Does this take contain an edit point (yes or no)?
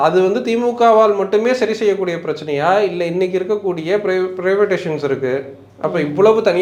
no